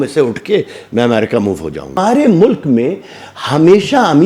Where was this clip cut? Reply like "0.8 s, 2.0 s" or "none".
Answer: 2.0 s